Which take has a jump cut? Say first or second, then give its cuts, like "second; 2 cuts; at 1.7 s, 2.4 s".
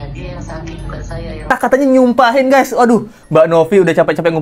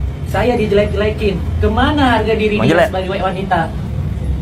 first; 1 cut; at 1.5 s